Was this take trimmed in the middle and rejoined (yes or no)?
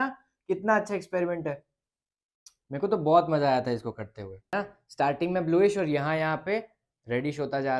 yes